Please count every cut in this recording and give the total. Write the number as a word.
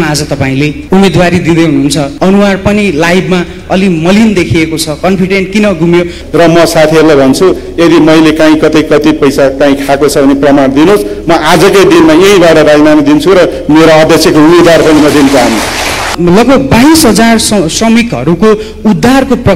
four